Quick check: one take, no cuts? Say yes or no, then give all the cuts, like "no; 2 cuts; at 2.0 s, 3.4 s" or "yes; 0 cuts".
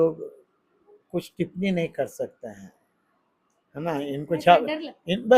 yes; 0 cuts